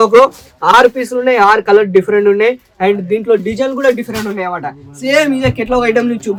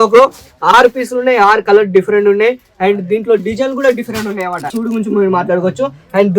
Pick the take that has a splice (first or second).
second